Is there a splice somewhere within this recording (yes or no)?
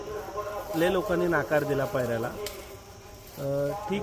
no